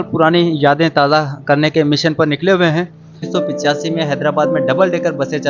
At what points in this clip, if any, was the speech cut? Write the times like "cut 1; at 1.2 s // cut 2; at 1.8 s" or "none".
cut 1; at 3.2 s